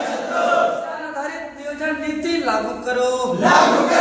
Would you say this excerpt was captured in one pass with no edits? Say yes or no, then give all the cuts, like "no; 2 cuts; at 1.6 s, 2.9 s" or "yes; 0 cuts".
no; 1 cut; at 1.0 s